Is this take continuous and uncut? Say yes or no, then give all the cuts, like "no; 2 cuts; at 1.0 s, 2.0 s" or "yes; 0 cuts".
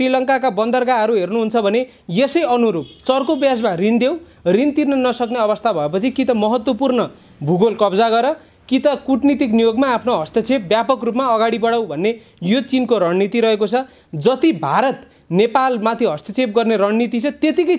yes; 0 cuts